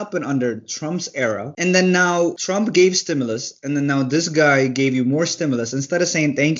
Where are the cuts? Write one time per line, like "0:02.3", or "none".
0:01.5
0:02.4